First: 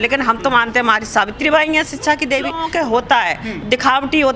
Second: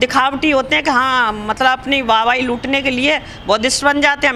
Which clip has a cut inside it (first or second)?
first